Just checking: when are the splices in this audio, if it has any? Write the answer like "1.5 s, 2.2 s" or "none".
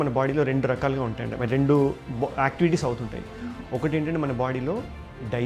none

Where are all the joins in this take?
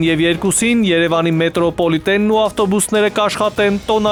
none

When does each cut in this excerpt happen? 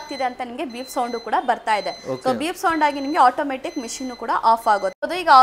none

